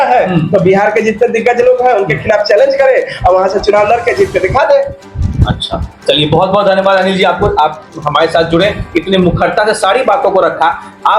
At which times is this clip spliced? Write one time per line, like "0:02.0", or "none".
none